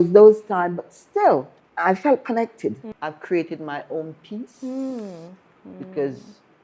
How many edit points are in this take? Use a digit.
1